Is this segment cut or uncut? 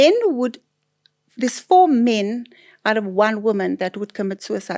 uncut